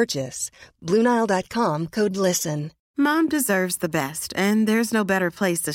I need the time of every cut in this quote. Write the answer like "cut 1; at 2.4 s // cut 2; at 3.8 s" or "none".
cut 1; at 2.8 s

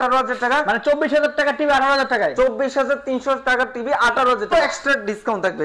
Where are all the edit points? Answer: cut 1; at 4.5 s

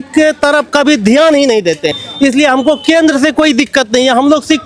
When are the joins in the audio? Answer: none

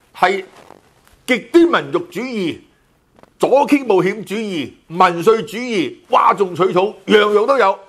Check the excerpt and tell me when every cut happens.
none

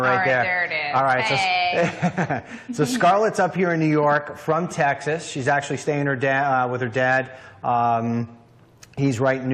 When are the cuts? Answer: none

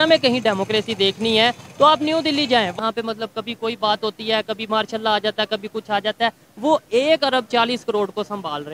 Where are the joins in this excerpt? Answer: cut 1; at 2.7 s

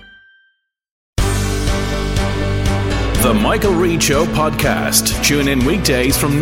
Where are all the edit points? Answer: cut 1; at 1.0 s

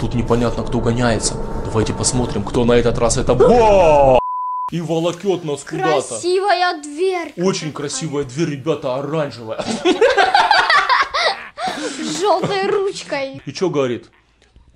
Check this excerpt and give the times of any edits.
cut 1; at 4.2 s // cut 2; at 13.3 s

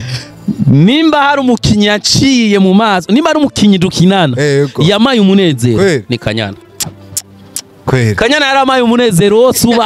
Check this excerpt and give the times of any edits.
none

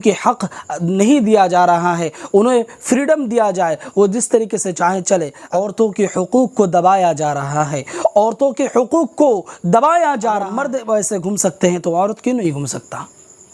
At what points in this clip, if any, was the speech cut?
cut 1; at 5.4 s // cut 2; at 10.6 s

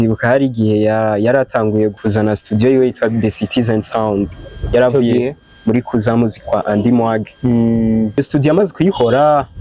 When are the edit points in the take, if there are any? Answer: cut 1; at 1.9 s // cut 2; at 8.2 s

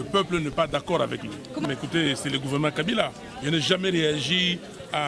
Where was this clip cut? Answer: cut 1; at 1.6 s

